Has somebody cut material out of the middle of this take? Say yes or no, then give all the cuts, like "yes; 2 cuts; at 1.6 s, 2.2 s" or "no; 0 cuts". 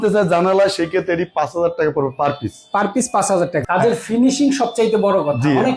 yes; 1 cut; at 3.6 s